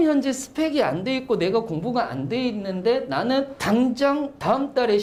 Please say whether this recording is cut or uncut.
uncut